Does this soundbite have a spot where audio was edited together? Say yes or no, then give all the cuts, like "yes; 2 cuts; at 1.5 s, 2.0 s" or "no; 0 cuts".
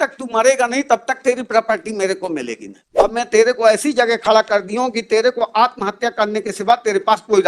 yes; 1 cut; at 2.8 s